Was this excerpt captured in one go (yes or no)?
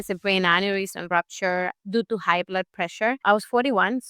no